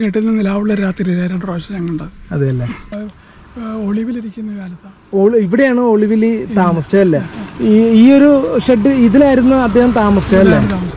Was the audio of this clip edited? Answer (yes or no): yes